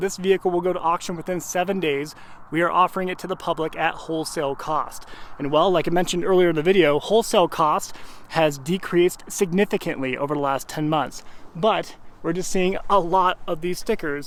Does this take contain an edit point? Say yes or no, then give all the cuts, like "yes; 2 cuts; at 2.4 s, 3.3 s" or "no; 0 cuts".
no; 0 cuts